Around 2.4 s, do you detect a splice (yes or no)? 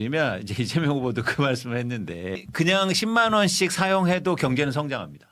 yes